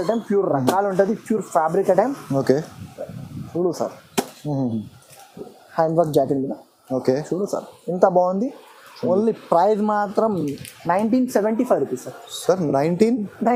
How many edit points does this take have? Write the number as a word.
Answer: zero